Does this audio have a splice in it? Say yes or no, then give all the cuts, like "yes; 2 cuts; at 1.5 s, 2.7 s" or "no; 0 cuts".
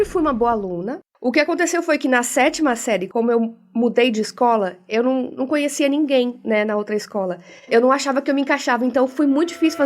yes; 3 cuts; at 1.0 s, 3.1 s, 7.7 s